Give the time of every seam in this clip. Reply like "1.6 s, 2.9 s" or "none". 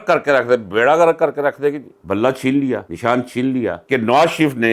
1.9 s, 3.8 s